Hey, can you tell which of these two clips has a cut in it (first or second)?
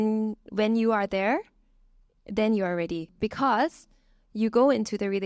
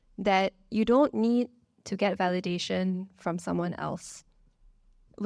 first